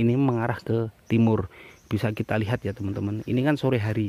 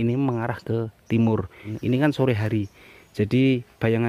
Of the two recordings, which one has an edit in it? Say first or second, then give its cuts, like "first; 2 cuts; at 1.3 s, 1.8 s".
second; 1 cut; at 1.7 s